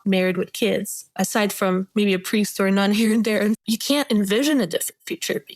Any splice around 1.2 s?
no; 1 cut; at 3.6 s

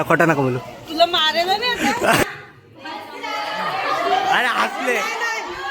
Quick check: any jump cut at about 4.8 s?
no; 1 cut; at 2.2 s

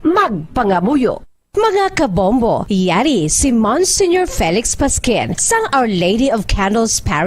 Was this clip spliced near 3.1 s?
no; 1 cut; at 1.3 s

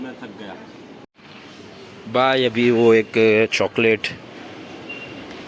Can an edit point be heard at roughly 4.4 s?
no; 1 cut; at 1.1 s

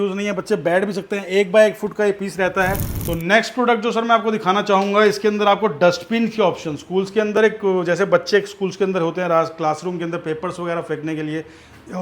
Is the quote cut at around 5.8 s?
no; 1 cut; at 2.9 s

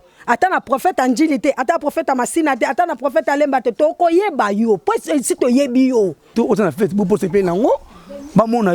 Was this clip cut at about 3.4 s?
no; 1 cut; at 6.3 s

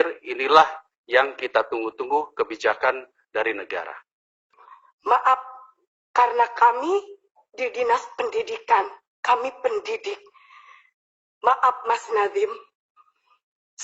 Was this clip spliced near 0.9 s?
no; 1 cut; at 4.4 s

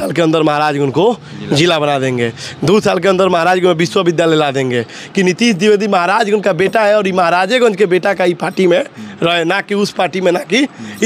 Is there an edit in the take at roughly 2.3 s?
no; 1 cut; at 5.0 s

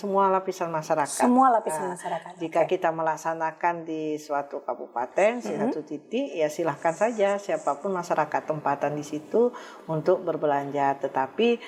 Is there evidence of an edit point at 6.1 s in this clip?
no; 0 cuts

